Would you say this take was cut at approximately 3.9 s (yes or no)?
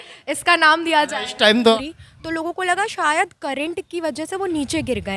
no